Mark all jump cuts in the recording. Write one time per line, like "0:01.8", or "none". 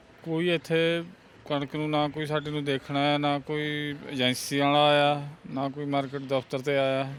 none